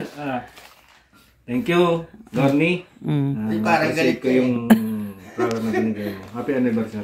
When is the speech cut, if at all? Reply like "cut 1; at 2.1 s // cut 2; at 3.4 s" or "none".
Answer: none